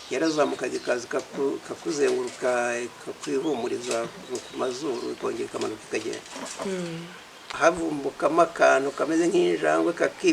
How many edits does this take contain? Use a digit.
1